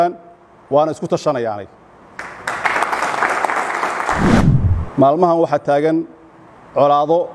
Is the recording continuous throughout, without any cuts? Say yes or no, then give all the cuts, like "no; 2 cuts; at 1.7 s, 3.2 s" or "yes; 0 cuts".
no; 1 cut; at 4.4 s